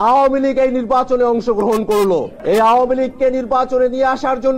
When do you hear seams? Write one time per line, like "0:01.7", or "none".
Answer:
0:02.3

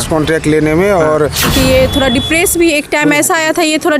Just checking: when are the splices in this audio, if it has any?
0:01.5

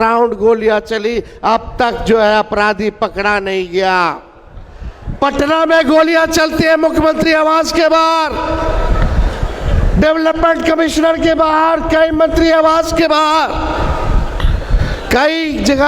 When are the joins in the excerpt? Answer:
none

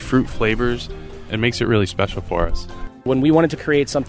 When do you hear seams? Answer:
0:01.2
0:03.1

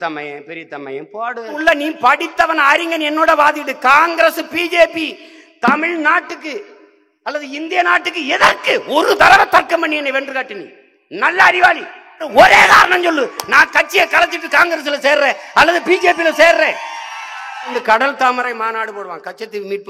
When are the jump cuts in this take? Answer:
0:01.6
0:12.2
0:17.8

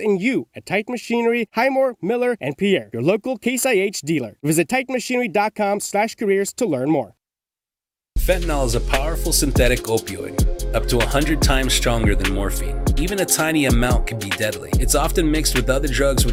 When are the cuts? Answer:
none

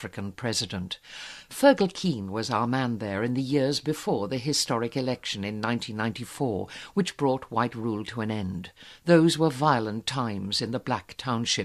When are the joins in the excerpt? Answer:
0:04.9

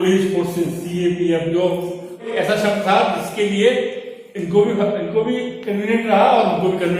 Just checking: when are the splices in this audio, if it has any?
0:02.3

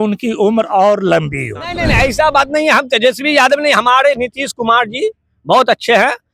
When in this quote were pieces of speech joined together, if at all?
0:01.8

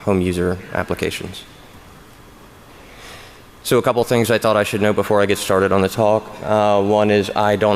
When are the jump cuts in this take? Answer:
0:05.8

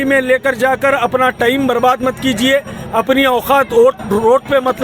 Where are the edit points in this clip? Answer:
none

